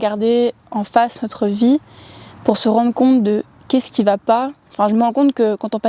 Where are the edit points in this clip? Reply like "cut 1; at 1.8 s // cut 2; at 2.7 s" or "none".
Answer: cut 1; at 4.7 s